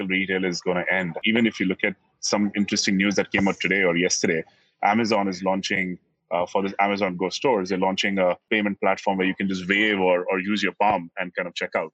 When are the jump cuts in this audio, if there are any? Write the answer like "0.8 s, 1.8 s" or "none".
1.2 s, 8.5 s